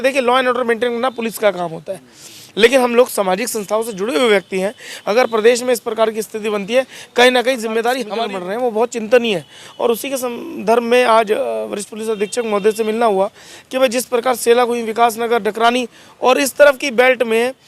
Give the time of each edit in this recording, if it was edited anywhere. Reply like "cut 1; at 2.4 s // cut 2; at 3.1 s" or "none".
cut 1; at 8.1 s